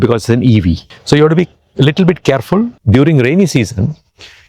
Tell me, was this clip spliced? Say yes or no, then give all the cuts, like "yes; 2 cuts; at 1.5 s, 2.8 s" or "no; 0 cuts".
yes; 2 cuts; at 0.9 s, 2.8 s